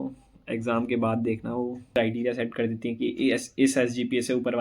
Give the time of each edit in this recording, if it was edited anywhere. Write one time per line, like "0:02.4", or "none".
0:01.9